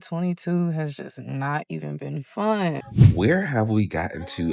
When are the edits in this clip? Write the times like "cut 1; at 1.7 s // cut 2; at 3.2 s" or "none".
cut 1; at 2.8 s